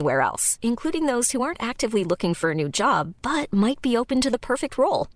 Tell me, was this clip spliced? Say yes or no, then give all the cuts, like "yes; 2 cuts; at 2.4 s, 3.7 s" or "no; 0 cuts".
no; 0 cuts